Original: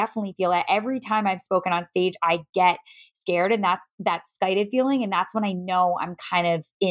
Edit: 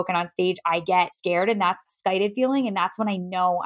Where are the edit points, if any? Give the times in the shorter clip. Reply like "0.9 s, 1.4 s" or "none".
0.9 s, 1.9 s